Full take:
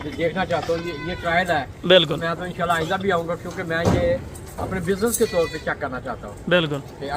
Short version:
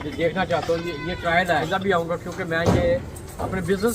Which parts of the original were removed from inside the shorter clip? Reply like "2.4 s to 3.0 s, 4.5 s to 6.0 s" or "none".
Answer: 1.7 s to 2.8 s